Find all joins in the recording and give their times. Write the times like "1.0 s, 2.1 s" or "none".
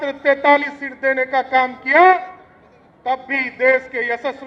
none